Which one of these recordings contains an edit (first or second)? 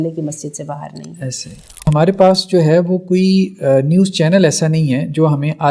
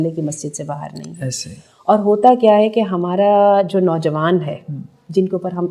first